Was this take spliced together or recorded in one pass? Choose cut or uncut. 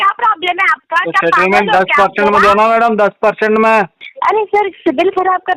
cut